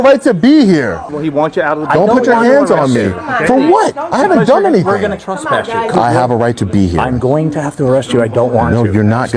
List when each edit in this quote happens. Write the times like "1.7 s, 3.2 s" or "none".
1.0 s, 6.0 s

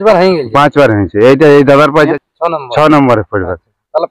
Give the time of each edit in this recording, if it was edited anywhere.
2.1 s

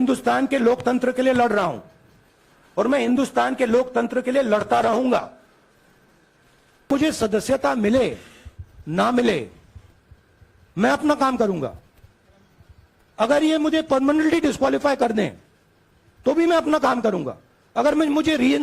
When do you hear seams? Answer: 6.9 s

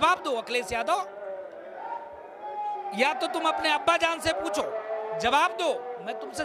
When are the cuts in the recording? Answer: none

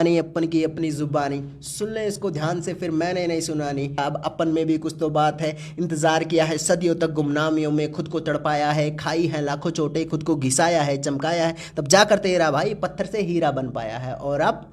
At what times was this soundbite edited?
4.0 s

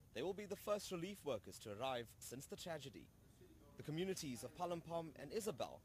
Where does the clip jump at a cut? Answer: 2.4 s

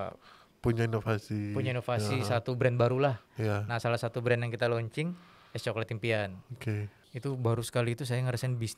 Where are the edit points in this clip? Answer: 7.0 s

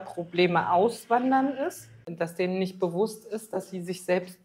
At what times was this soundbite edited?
2.1 s

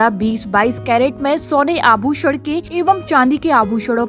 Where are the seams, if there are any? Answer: 2.7 s

